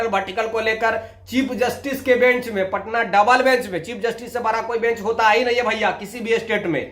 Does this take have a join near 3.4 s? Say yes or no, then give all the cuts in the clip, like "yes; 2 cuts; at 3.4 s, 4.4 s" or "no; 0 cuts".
no; 0 cuts